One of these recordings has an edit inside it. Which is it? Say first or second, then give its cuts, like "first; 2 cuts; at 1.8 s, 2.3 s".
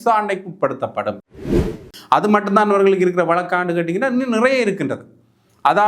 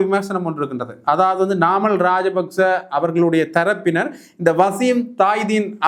first; 1 cut; at 1.4 s